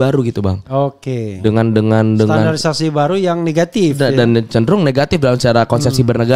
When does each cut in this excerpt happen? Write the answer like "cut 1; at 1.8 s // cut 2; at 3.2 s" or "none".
none